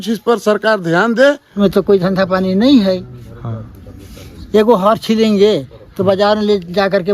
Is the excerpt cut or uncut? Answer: cut